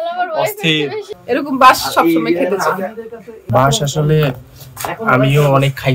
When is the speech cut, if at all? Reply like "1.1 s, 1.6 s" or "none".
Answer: 1.0 s